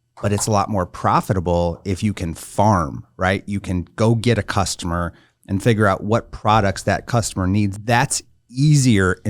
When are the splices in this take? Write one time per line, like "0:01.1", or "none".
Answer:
0:07.7